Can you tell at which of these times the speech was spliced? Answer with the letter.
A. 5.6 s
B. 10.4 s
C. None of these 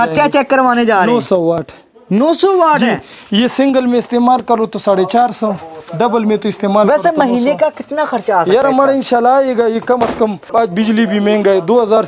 B